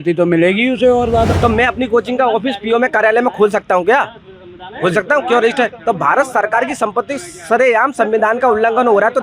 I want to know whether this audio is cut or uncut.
cut